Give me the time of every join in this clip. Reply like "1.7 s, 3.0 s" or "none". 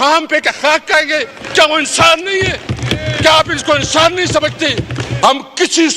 5.0 s